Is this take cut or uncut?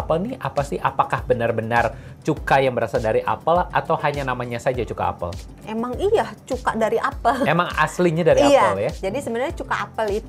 uncut